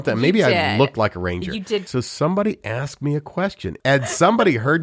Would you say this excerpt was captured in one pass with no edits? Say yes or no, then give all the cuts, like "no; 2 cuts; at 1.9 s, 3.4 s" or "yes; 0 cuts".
no; 2 cuts; at 1.9 s, 3.7 s